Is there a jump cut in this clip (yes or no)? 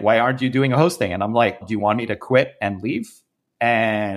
yes